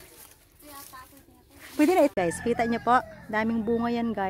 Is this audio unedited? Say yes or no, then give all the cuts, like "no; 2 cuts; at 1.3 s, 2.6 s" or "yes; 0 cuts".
no; 1 cut; at 2.1 s